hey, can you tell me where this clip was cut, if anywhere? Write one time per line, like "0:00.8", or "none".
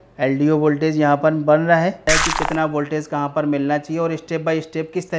0:02.1
0:04.2